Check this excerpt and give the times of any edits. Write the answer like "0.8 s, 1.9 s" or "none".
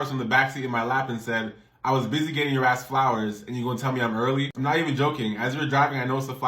4.5 s